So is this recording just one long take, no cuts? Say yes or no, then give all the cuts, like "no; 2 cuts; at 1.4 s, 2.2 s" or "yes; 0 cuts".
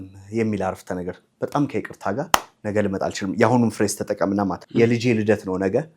no; 1 cut; at 4.6 s